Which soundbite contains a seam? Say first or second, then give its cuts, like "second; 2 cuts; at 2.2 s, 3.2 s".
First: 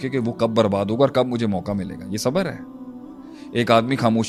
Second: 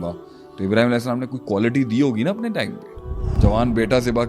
second; 1 cut; at 3.3 s